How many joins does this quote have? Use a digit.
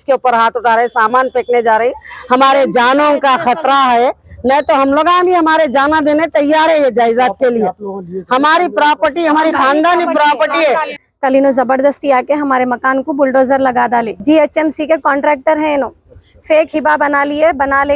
3